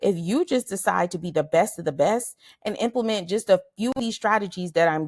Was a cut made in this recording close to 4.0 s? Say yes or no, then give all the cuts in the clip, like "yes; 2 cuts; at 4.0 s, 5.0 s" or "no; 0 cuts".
yes; 1 cut; at 4.0 s